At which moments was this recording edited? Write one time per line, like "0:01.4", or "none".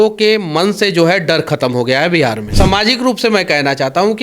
0:02.5